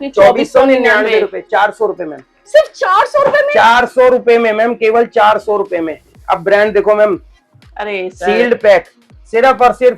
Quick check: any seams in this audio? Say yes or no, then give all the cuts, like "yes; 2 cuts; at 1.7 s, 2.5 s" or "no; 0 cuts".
no; 0 cuts